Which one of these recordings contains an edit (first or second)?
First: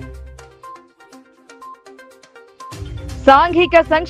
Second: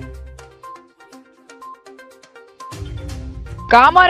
first